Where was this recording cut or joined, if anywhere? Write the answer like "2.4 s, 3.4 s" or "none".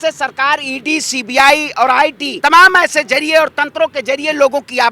2.3 s